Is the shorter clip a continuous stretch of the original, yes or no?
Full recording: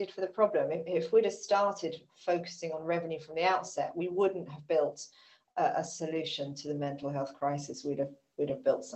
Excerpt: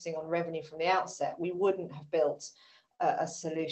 yes